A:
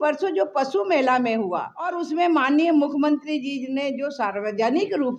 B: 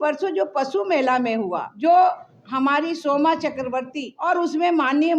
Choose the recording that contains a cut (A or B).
B